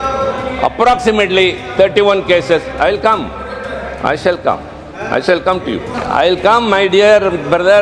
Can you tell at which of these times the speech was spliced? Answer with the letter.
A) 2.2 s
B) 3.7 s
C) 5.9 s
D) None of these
C